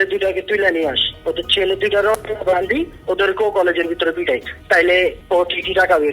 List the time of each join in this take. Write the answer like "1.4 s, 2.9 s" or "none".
4.5 s, 5.2 s